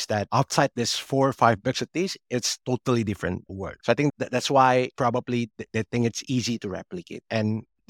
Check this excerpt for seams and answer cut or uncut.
uncut